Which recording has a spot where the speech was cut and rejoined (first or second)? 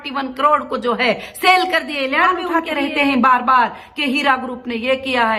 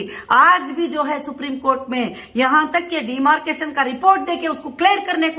first